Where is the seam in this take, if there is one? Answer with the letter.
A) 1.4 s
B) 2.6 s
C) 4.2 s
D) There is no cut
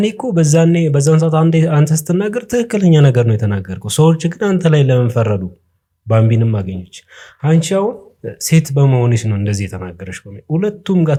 D